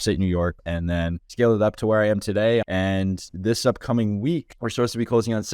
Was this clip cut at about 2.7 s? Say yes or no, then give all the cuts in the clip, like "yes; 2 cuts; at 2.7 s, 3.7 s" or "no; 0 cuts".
yes; 3 cuts; at 0.9 s, 2.7 s, 4.6 s